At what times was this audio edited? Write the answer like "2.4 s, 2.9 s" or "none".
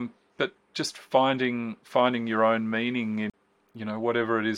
3.3 s